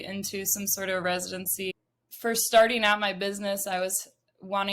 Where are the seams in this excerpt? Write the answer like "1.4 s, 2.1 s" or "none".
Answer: 1.7 s

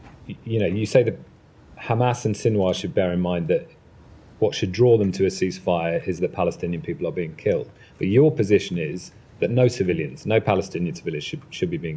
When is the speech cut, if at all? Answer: none

